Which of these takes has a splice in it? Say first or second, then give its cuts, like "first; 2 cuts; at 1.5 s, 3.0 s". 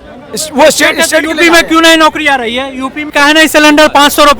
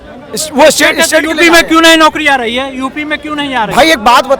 first; 1 cut; at 3.1 s